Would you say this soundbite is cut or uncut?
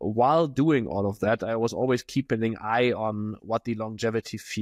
uncut